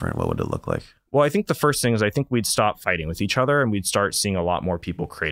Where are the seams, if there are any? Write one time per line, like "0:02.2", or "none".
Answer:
none